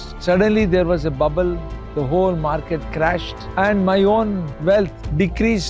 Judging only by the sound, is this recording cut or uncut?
cut